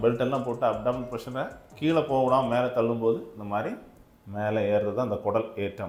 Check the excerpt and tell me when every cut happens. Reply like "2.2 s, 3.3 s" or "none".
none